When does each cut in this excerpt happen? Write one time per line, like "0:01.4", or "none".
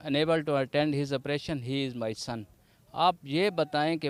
none